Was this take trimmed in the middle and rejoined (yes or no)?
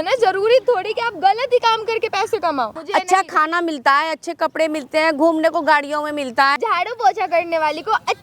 yes